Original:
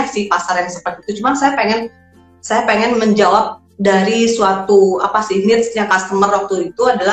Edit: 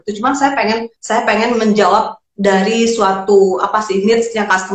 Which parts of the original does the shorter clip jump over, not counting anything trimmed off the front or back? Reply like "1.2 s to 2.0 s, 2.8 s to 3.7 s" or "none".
1.9 s to 2.3 s